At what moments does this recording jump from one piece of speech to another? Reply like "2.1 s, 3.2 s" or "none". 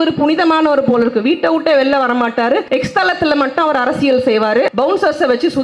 2.6 s, 4.7 s